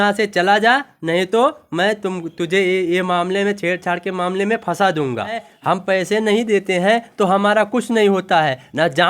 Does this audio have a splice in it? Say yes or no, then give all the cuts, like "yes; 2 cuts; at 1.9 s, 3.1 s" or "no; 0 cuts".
yes; 1 cut; at 5.5 s